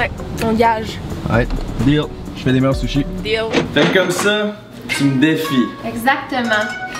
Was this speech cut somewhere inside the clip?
no; 0 cuts

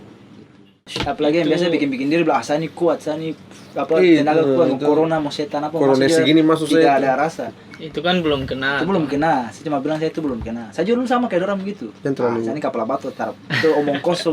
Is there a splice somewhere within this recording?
yes; 1 cut; at 0.9 s

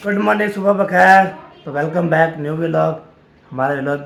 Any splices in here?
no; 0 cuts

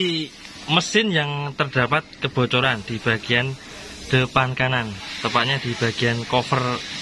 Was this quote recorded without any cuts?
yes; 0 cuts

